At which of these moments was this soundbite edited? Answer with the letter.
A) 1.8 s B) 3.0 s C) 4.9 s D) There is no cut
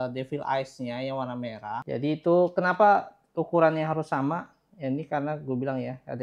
A